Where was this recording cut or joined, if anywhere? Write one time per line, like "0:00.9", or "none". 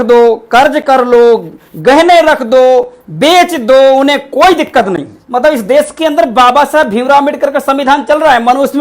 0:05.1